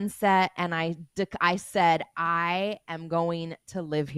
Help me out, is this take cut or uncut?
uncut